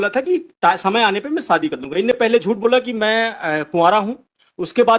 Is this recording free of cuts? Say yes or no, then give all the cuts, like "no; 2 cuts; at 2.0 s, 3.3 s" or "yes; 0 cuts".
yes; 0 cuts